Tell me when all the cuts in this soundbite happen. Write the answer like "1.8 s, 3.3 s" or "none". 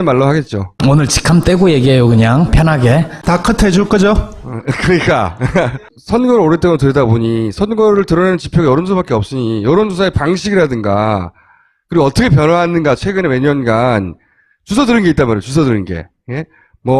12.4 s